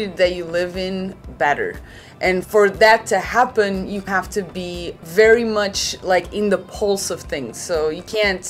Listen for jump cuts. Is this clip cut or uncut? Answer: cut